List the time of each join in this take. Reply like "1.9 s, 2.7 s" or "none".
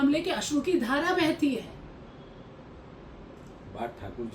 none